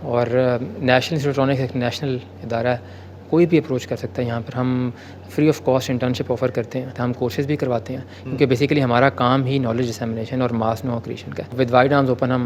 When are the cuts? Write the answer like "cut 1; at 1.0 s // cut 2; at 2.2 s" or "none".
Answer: cut 1; at 6.9 s // cut 2; at 11.5 s

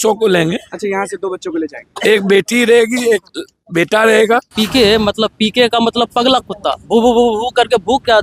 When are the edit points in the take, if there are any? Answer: cut 1; at 4.5 s

